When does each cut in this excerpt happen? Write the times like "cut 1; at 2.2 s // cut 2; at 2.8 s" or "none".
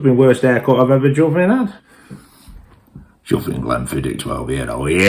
cut 1; at 1.8 s